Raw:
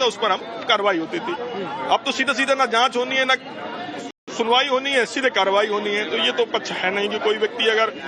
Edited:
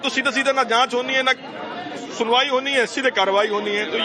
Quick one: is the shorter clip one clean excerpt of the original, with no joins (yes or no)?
no